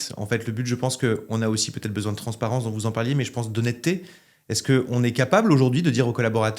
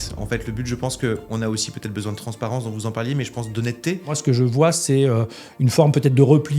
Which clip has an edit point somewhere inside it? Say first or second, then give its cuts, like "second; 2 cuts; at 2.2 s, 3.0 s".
second; 1 cut; at 4.2 s